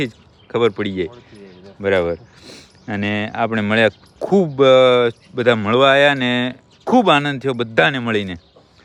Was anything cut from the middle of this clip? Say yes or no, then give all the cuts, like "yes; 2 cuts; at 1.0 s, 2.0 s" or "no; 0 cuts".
no; 0 cuts